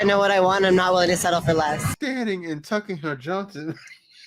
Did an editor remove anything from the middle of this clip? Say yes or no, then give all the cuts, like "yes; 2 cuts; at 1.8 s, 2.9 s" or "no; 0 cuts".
yes; 1 cut; at 1.9 s